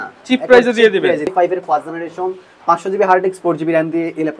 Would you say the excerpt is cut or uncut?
cut